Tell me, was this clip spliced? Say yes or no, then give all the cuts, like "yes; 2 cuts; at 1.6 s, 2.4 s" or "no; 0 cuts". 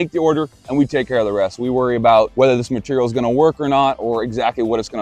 yes; 1 cut; at 2.3 s